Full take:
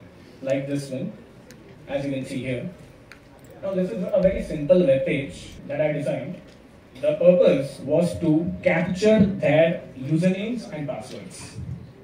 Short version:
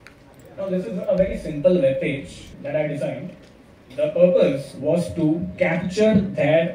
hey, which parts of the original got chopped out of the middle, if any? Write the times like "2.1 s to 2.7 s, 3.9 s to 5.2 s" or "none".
none